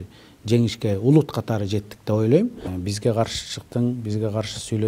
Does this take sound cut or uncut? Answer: cut